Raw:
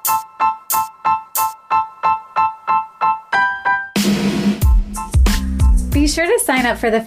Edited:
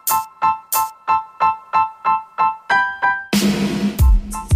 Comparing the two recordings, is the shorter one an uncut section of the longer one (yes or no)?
yes